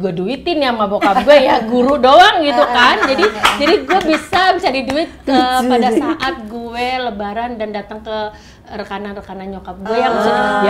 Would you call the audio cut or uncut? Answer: uncut